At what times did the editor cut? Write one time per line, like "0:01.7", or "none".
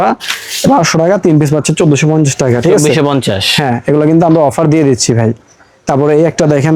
none